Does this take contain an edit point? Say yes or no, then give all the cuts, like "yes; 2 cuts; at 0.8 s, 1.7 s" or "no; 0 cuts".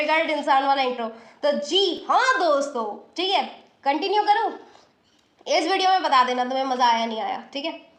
no; 0 cuts